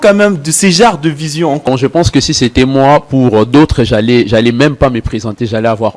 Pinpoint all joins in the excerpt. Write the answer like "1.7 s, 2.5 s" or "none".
1.7 s